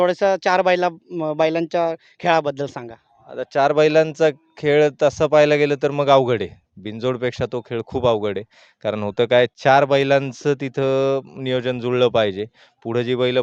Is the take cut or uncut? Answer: uncut